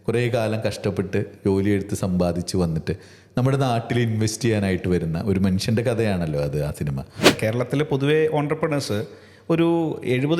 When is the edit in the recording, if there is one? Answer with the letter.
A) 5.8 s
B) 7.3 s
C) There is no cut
B